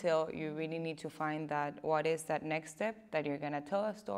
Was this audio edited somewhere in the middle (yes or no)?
no